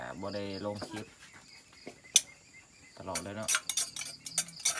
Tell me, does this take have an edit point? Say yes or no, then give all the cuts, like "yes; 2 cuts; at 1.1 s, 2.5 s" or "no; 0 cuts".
no; 0 cuts